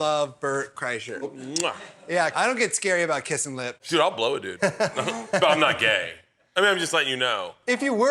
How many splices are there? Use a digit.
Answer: 3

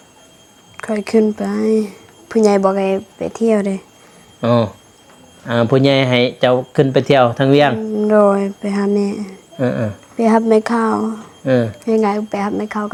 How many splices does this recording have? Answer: 0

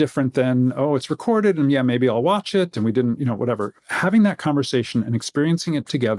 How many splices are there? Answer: 0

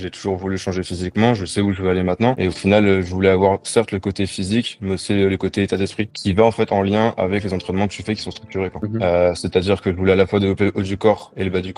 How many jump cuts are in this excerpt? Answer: 3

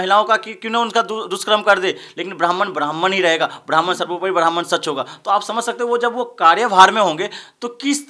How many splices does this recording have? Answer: 0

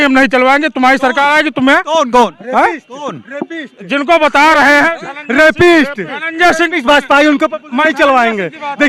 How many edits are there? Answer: 0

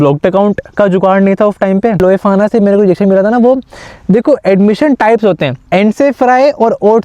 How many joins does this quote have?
2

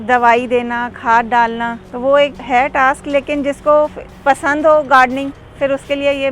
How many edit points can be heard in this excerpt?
3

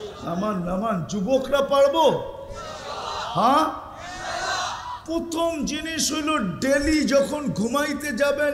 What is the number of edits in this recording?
0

